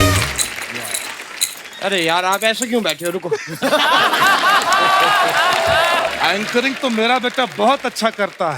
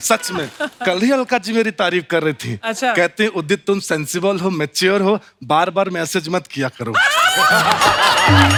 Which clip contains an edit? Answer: first; 1 cut; at 6.1 s

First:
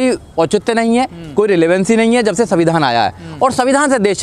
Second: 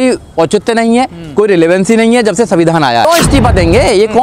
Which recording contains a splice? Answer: second; 1 cut; at 3.0 s

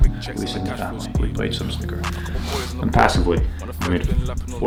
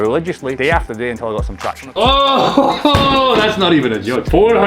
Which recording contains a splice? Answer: second; 1 cut; at 1.8 s

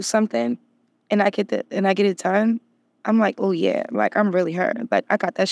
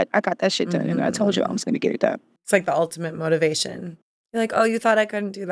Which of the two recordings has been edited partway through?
second; 2 cuts; at 2.4 s, 4.4 s

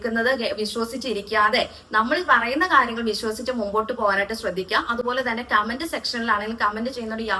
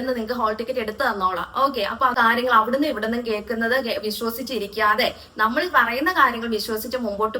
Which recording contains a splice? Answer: second; 1 cut; at 2.1 s

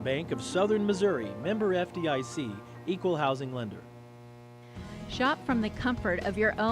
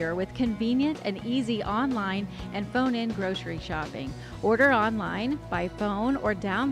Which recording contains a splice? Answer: first; 1 cut; at 4.2 s

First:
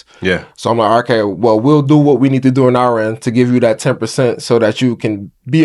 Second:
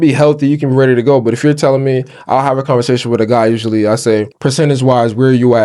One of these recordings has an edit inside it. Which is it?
second; 1 cut; at 4.3 s

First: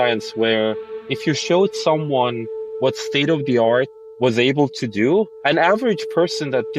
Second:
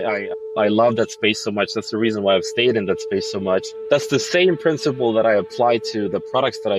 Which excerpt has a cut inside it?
first; 1 cut; at 5.3 s

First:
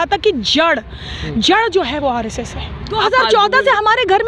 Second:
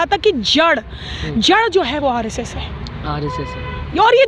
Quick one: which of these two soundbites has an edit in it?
first; 1 cut; at 2.8 s

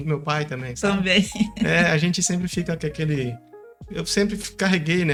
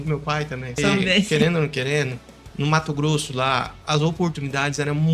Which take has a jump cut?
second; 1 cut; at 1.3 s

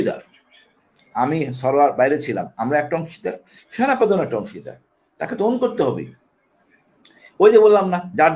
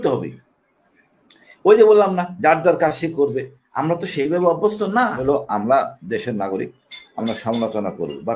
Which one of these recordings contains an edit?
second; 1 cut; at 5.2 s

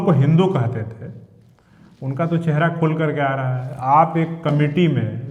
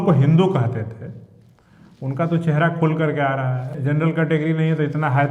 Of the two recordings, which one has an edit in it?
second; 1 cut; at 3.7 s

